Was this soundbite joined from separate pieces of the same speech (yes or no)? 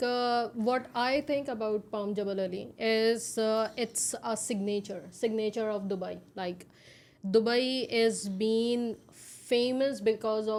no